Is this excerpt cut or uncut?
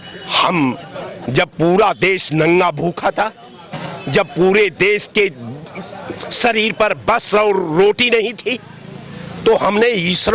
uncut